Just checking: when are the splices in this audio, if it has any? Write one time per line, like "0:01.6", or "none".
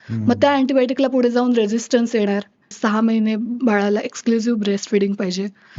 0:02.8